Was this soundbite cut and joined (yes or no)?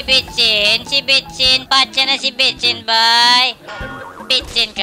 yes